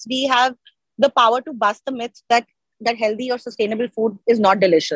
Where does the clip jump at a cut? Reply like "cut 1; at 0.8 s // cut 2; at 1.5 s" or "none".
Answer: none